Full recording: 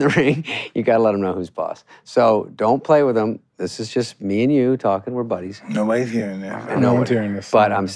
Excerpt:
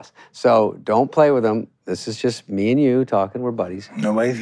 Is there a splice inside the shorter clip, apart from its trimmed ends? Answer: no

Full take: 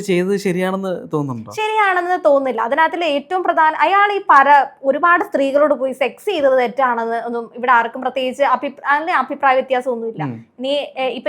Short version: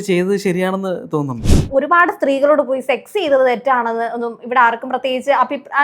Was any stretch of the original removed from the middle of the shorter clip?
yes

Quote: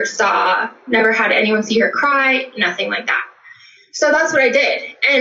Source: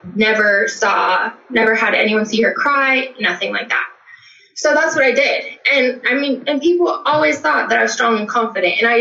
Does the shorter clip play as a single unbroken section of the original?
yes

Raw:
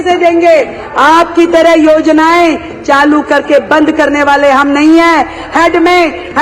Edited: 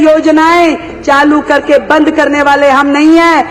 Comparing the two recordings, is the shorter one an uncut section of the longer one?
yes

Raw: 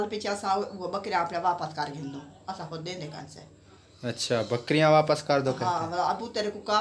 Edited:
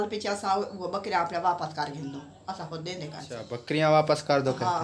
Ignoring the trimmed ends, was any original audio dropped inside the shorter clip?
yes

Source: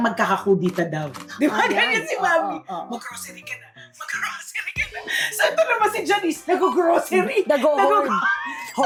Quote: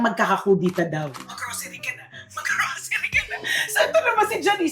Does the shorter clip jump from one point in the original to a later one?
yes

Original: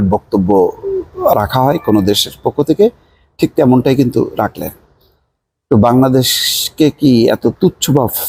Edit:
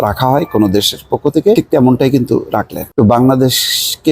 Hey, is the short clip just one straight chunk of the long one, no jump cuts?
no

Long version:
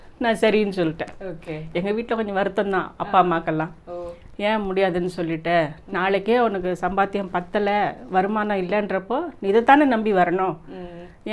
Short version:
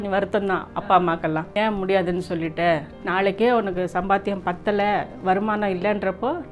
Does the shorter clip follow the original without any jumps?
no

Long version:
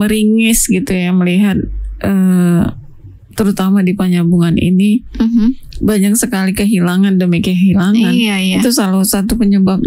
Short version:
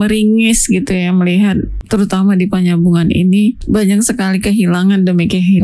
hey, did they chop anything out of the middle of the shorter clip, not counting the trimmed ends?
yes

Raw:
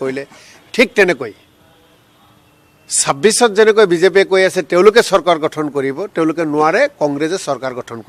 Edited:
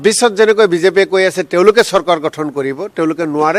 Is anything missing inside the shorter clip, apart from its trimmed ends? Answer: no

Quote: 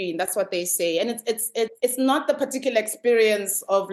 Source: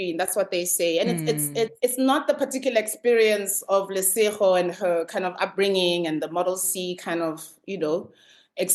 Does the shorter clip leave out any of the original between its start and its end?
no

